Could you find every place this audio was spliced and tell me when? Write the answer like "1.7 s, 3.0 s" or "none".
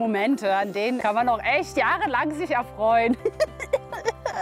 none